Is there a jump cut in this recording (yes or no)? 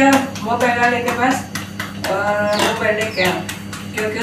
no